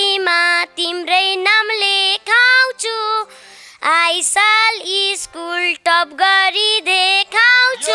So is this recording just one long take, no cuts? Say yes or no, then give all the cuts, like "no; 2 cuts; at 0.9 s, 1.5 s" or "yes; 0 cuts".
yes; 0 cuts